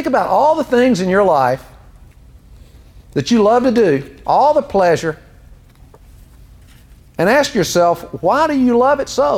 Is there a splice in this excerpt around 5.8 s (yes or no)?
yes